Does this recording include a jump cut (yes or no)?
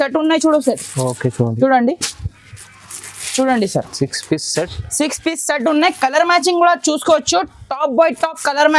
no